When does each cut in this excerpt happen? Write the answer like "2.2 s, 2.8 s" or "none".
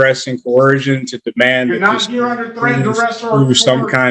none